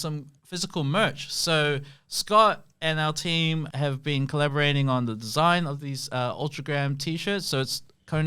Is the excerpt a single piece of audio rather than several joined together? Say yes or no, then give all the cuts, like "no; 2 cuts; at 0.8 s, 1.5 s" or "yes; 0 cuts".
no; 1 cut; at 3.7 s